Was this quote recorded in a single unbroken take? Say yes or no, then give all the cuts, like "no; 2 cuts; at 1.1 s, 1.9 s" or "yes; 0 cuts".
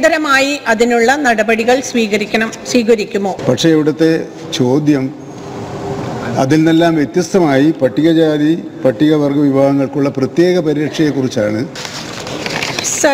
no; 2 cuts; at 3.4 s, 11.8 s